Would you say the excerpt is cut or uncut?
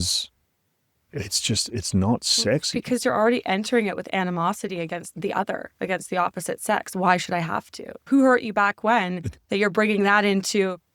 cut